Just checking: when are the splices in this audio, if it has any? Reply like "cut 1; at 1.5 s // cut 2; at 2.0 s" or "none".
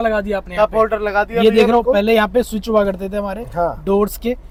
none